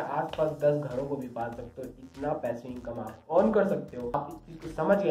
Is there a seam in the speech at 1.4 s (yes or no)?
no